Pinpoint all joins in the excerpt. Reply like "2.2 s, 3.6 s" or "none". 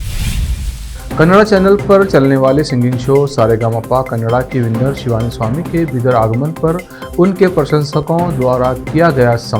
0.9 s